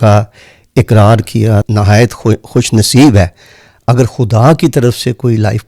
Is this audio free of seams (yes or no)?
no